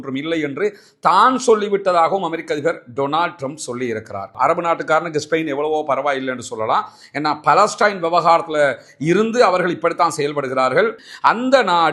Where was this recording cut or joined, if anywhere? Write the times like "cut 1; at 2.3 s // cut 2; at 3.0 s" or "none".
cut 1; at 4.3 s // cut 2; at 11.0 s